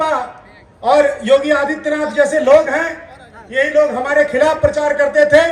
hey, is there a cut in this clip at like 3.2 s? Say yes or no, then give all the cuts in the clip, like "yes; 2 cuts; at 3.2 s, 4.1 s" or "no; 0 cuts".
no; 0 cuts